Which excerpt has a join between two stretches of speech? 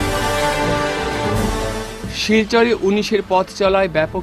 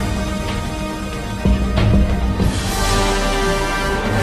first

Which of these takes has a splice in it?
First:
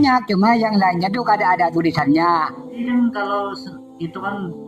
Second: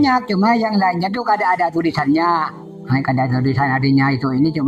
first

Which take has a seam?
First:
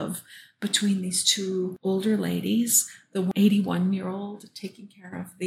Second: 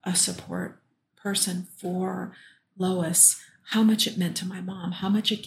first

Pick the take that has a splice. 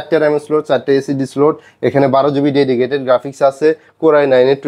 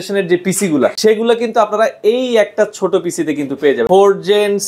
second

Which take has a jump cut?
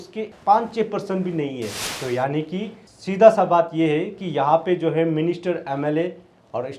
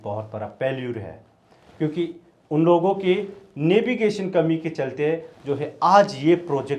first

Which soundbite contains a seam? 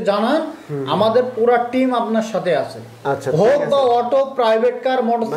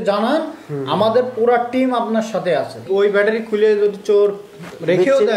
second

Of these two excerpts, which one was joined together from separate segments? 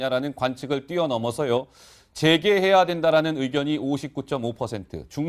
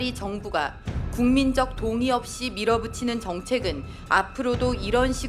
first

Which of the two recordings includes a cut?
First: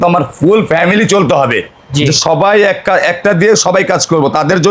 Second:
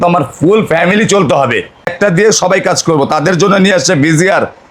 second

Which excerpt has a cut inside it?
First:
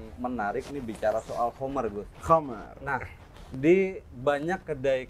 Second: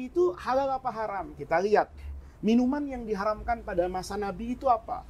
second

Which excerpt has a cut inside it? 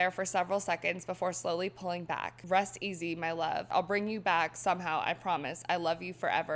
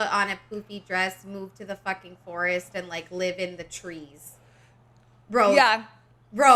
first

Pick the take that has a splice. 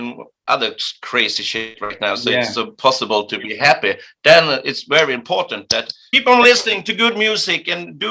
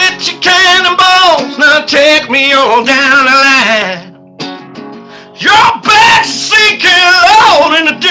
first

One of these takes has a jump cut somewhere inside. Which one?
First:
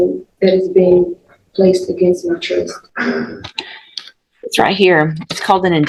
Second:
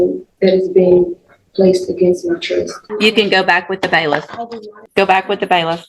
second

